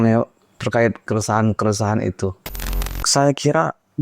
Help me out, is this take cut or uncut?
cut